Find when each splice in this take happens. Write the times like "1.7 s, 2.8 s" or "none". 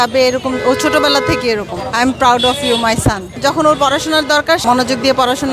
1.7 s, 3.3 s, 4.6 s

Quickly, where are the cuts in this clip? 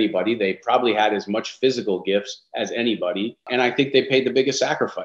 3.5 s

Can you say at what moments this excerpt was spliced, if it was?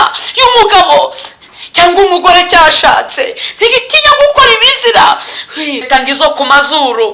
5.8 s

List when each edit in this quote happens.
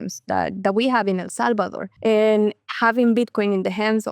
1.8 s

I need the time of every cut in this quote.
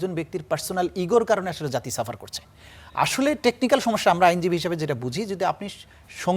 none

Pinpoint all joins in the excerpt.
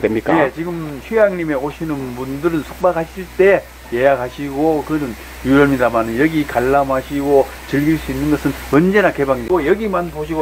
9.5 s

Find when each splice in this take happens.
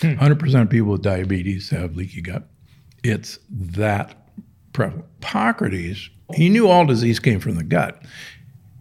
5.2 s, 6.3 s

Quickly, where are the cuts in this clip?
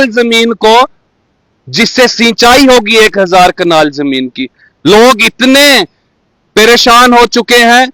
none

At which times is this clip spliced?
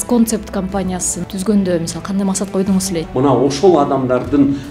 1.2 s, 3.0 s

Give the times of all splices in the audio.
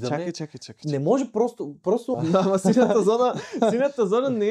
2.1 s

